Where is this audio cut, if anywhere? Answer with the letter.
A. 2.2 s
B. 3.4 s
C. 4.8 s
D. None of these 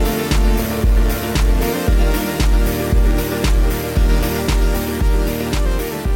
C